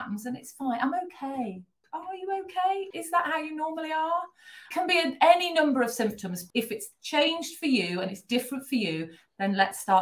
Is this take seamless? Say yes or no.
no